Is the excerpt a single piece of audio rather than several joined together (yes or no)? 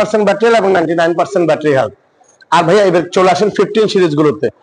yes